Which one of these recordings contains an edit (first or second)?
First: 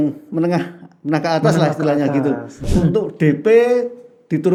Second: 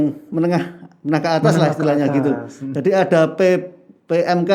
first